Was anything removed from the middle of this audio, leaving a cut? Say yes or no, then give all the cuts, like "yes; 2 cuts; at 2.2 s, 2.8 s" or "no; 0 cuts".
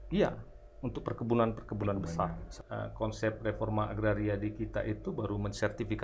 yes; 1 cut; at 2.5 s